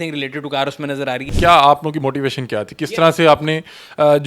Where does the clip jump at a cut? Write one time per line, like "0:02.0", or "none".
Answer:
0:01.3